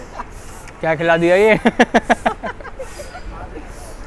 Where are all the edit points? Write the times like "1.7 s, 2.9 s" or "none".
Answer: none